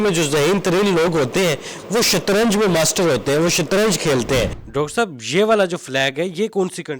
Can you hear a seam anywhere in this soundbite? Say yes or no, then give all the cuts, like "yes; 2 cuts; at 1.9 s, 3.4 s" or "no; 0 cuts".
yes; 1 cut; at 4.6 s